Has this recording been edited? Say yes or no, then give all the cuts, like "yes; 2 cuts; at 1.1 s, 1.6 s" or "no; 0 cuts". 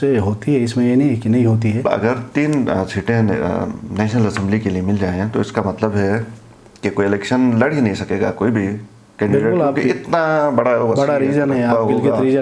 yes; 1 cut; at 1.8 s